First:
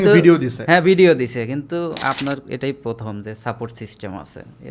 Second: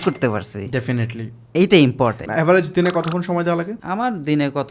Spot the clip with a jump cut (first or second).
second